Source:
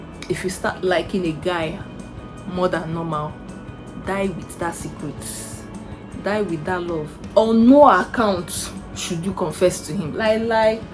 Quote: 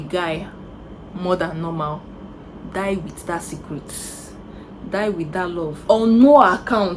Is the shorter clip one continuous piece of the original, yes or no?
no